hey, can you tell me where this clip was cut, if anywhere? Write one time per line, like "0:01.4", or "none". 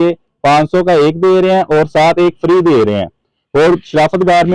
none